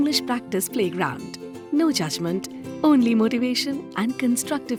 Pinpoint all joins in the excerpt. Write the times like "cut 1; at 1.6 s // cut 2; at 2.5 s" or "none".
none